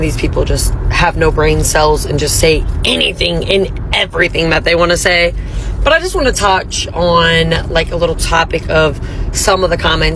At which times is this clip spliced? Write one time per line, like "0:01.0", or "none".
none

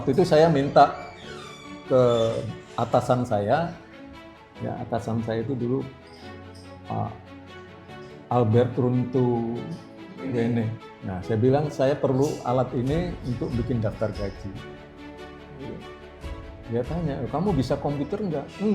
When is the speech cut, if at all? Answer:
0:10.9

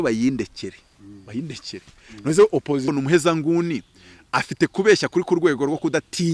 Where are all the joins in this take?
0:02.8

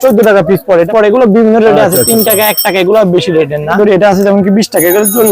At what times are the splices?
0:00.9
0:03.8

